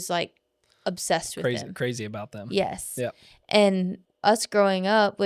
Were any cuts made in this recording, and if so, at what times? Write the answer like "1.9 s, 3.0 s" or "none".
4.0 s